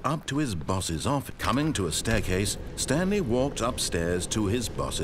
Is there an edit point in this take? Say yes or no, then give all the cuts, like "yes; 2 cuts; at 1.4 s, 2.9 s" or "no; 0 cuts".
yes; 1 cut; at 1.3 s